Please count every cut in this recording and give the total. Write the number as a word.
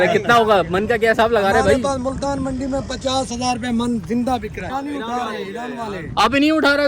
one